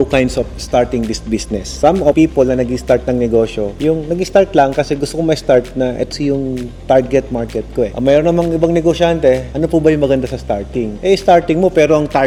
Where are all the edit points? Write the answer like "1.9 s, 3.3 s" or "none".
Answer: none